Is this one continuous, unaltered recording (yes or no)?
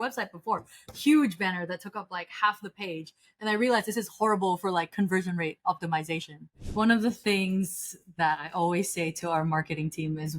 no